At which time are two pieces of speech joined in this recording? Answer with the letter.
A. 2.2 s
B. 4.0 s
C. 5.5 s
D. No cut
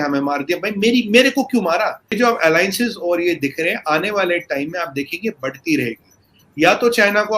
A